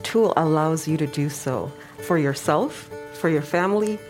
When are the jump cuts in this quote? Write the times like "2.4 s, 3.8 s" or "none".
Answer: 2.0 s